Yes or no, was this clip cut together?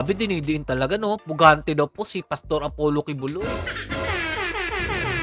no